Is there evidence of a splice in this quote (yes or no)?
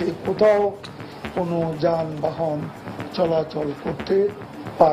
no